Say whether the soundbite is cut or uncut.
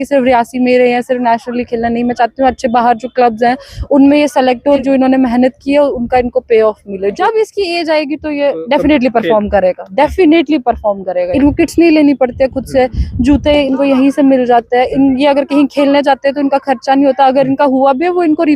cut